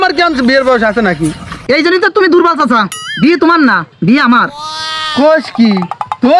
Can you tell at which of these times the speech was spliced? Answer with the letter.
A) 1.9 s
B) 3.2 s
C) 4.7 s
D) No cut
D